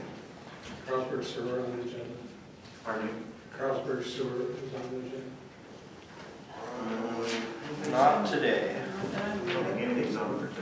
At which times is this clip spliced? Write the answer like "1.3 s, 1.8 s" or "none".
none